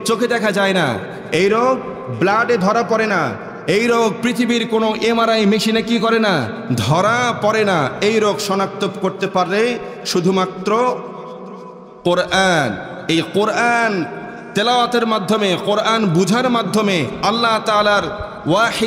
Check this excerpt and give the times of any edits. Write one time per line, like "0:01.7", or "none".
none